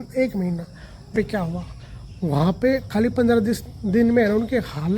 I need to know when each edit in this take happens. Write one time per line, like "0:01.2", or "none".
0:01.1